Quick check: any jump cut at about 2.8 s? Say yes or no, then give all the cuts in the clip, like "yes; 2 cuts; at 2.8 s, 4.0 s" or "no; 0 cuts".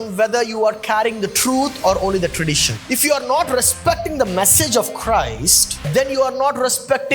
yes; 2 cuts; at 2.8 s, 5.9 s